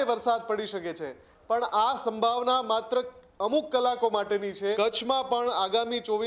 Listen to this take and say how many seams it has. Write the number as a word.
one